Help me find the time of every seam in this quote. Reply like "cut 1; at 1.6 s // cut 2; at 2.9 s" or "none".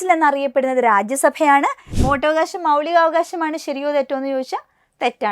cut 1; at 1.9 s